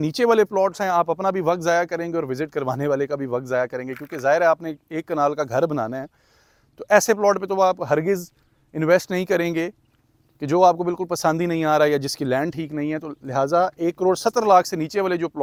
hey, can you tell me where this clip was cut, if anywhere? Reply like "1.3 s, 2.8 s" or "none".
none